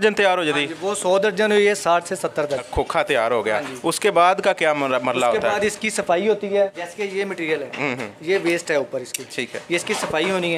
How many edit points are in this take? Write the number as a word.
two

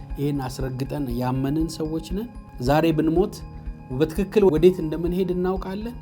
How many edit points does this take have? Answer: two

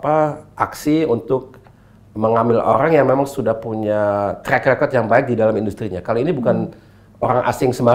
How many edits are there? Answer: zero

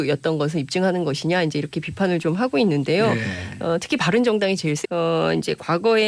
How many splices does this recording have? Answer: zero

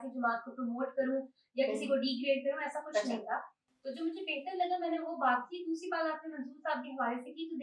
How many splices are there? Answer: zero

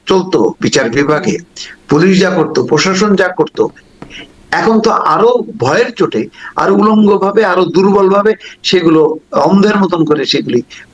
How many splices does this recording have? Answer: zero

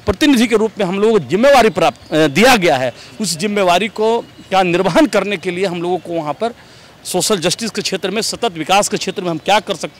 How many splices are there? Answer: zero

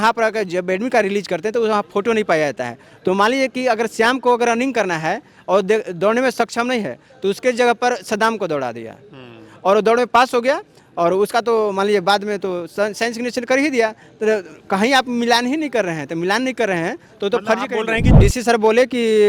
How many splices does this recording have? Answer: one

